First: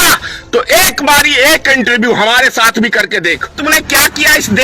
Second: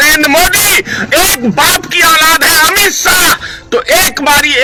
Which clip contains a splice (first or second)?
first